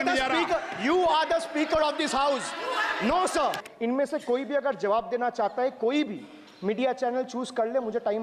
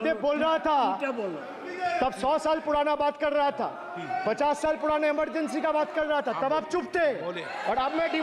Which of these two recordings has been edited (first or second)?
first